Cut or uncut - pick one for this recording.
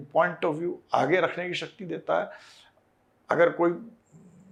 uncut